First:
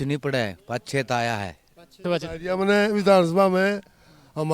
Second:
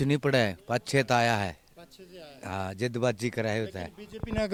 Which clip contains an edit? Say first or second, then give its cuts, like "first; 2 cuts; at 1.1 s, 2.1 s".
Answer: first; 1 cut; at 2.0 s